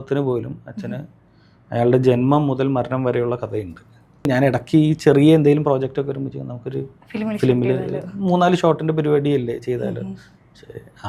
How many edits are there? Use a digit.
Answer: 1